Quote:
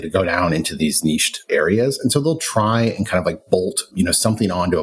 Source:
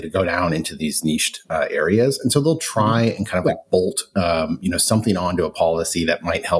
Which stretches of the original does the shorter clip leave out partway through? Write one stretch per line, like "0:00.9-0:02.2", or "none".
0:01.5-0:01.7
0:04.1-0:04.6